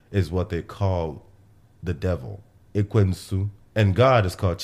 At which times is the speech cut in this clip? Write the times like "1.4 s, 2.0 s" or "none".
3.6 s

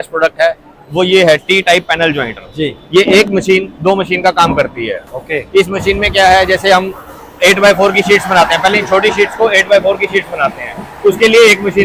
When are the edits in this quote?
none

